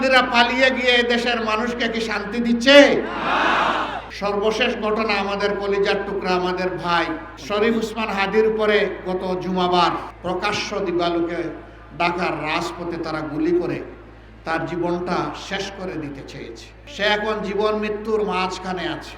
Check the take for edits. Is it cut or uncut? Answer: cut